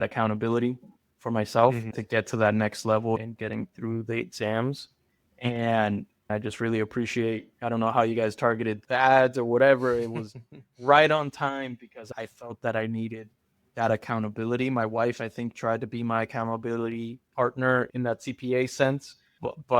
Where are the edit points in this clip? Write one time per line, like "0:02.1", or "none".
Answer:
0:01.9
0:03.2
0:06.3
0:08.8
0:12.0
0:17.9